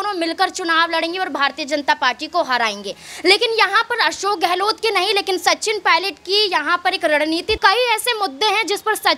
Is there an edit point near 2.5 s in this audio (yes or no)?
no